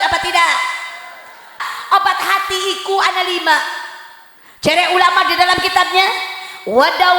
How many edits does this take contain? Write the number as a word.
one